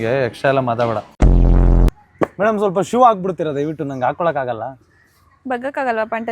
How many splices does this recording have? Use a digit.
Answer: 1